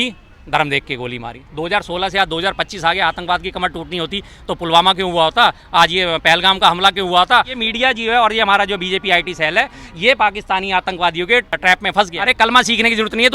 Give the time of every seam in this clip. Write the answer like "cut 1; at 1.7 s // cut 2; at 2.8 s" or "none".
cut 1; at 1.4 s // cut 2; at 7.6 s // cut 3; at 12.1 s